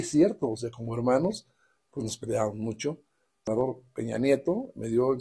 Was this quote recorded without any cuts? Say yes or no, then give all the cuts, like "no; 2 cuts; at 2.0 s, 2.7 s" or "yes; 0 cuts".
no; 1 cut; at 3.5 s